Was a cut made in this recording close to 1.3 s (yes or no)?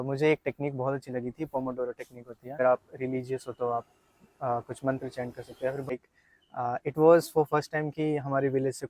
no